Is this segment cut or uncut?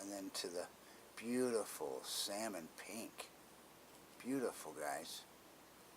cut